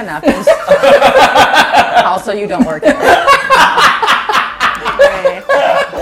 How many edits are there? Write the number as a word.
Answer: zero